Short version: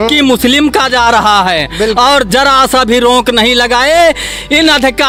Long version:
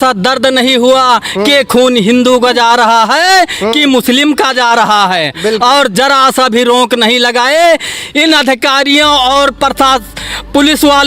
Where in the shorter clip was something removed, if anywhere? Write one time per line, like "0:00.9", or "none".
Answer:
none